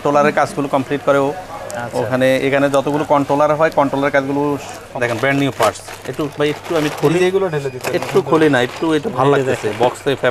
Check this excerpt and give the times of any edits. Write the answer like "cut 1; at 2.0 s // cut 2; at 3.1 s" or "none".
cut 1; at 4.8 s